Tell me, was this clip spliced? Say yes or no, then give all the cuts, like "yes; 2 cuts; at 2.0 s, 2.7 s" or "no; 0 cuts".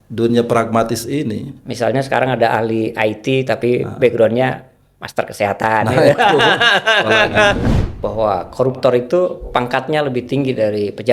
yes; 1 cut; at 7.6 s